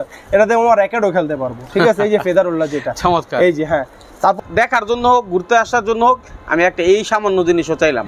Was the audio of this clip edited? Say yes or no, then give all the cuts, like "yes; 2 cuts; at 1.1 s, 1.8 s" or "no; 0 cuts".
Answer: yes; 1 cut; at 4.4 s